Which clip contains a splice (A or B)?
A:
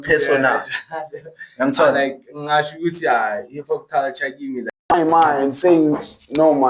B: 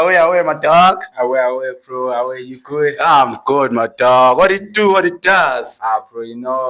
A